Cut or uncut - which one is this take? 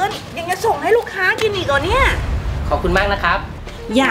cut